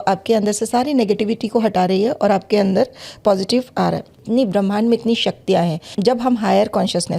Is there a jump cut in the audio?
yes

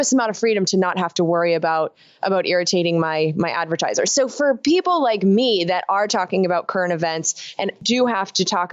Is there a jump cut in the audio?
yes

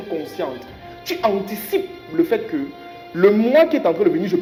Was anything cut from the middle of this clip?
no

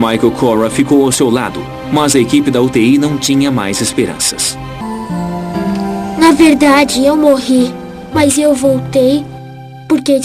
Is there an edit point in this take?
yes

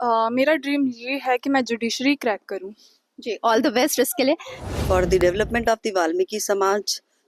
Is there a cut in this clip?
yes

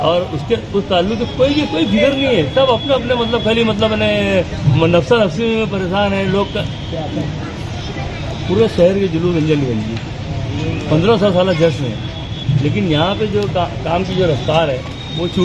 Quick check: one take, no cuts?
yes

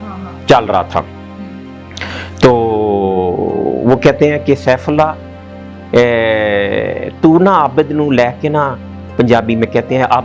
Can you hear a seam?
no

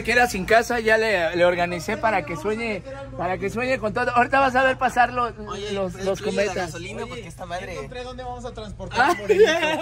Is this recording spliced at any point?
no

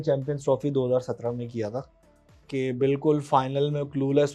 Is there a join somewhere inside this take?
no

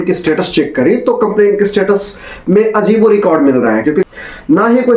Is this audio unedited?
no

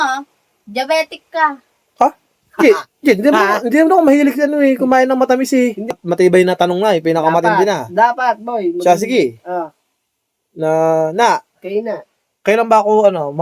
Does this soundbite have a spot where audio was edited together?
yes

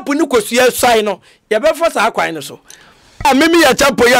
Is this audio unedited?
no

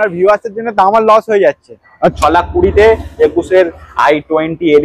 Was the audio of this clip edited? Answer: yes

